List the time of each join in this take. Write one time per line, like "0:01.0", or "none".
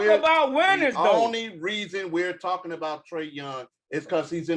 none

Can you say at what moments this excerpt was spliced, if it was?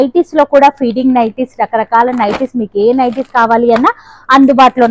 none

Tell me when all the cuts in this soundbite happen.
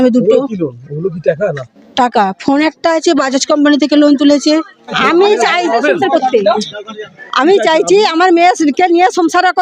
0:05.0

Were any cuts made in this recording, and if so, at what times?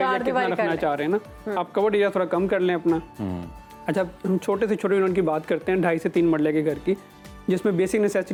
none

